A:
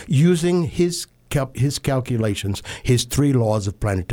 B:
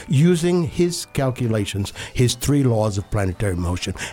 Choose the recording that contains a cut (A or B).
B